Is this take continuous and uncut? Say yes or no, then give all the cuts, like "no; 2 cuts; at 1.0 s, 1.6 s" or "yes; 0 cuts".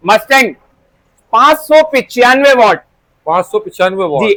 yes; 0 cuts